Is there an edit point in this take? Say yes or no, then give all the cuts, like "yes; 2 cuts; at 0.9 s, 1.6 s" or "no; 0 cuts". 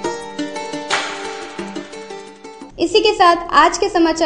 no; 0 cuts